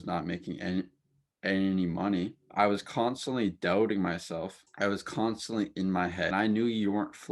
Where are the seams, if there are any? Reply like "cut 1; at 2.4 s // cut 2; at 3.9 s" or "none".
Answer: cut 1; at 2.4 s // cut 2; at 4.6 s // cut 3; at 6.3 s